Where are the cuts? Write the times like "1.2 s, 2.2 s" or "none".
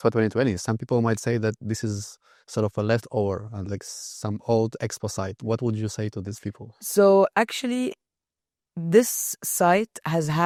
none